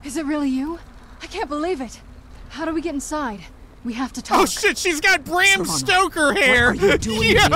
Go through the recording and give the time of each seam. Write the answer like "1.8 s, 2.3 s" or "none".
4.2 s